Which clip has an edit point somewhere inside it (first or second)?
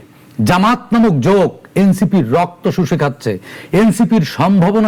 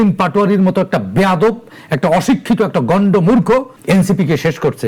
second